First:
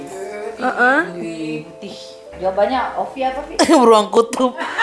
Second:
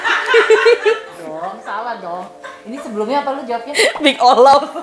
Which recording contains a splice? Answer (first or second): first